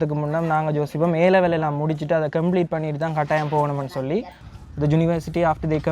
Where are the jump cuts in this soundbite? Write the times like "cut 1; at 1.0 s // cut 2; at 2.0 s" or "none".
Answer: cut 1; at 4.4 s